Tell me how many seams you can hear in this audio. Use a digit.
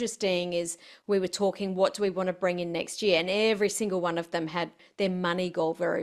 1